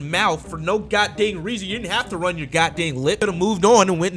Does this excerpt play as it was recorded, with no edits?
no; 1 cut; at 3.2 s

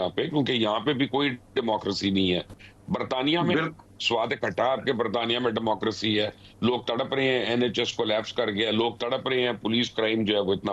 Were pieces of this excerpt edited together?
no; 0 cuts

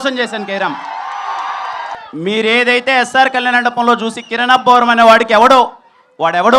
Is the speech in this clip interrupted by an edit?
yes; 1 cut; at 1.9 s

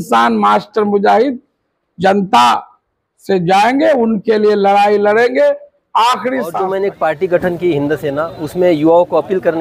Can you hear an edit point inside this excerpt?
yes; 1 cut; at 6.6 s

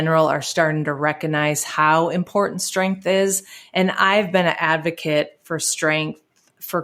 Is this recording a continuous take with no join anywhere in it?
yes; 0 cuts

